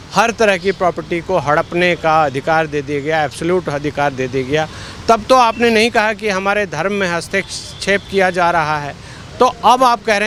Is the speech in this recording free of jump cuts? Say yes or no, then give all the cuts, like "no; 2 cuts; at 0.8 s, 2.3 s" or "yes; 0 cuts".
yes; 0 cuts